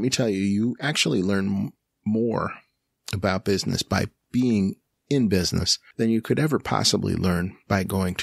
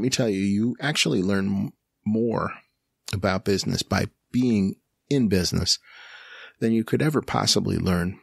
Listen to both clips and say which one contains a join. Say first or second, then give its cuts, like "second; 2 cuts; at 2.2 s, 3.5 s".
first; 1 cut; at 5.8 s